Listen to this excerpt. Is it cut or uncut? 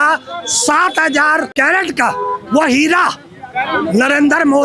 cut